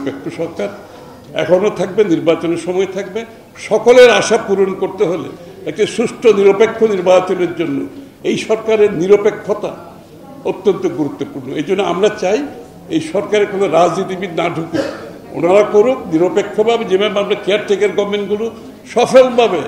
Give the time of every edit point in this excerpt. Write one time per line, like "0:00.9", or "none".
none

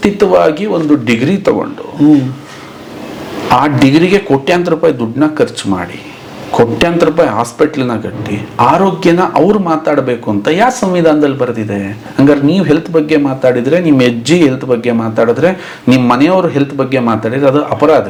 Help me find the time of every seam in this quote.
none

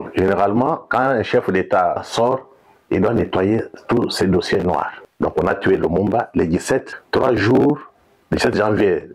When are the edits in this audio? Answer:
0:02.0
0:05.0
0:07.0

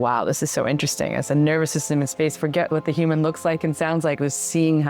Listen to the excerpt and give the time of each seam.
0:02.7

